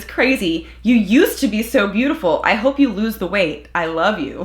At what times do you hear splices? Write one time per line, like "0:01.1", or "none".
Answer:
none